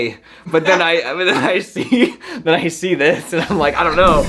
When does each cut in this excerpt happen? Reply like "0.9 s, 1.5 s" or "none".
none

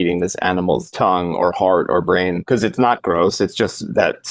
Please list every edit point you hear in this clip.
0.9 s, 2.4 s

